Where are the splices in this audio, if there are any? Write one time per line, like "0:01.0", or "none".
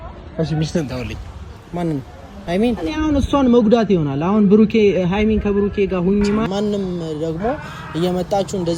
0:02.8
0:06.5